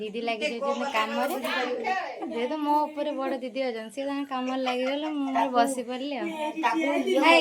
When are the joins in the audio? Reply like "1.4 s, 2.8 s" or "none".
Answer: none